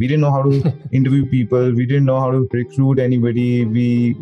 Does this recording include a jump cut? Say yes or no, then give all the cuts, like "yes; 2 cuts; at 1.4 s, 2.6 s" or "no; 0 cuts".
yes; 1 cut; at 2.6 s